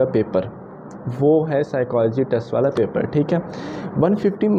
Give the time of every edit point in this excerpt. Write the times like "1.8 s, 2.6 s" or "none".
none